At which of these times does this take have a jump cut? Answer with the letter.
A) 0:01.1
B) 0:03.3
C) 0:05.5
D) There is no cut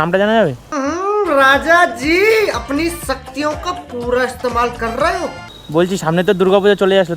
C